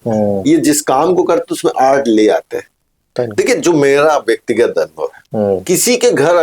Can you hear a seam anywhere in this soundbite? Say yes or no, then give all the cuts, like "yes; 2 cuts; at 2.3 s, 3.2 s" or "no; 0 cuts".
yes; 1 cut; at 3.2 s